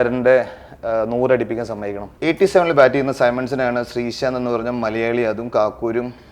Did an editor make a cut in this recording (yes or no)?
yes